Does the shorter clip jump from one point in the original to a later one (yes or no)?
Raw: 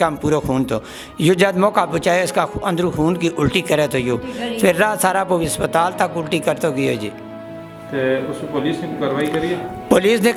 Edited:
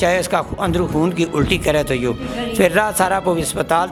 no